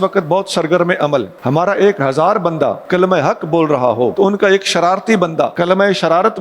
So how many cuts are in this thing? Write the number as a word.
four